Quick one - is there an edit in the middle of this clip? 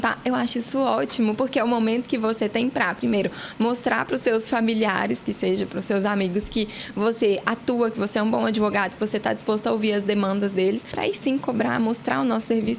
yes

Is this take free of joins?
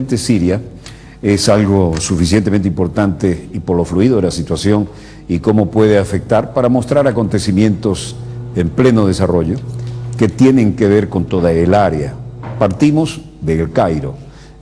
yes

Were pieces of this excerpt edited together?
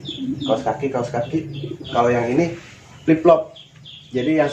yes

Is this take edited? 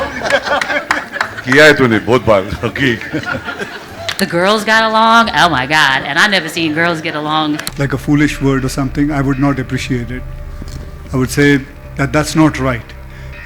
yes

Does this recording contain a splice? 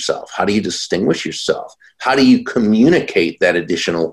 no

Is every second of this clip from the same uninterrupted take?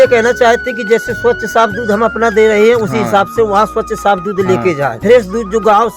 no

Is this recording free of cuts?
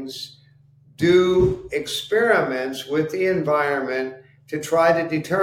yes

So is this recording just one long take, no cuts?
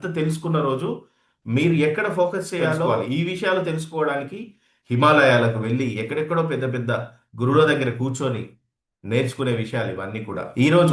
no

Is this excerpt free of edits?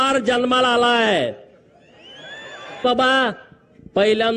no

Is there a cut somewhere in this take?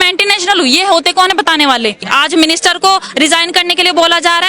yes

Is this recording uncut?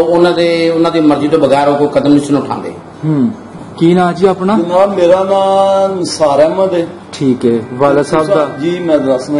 no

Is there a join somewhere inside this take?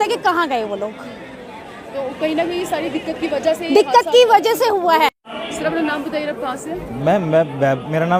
no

